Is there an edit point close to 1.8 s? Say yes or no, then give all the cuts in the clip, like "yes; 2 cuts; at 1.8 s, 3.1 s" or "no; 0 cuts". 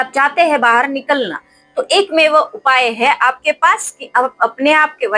no; 0 cuts